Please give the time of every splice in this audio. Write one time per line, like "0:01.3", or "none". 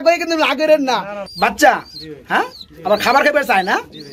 0:01.2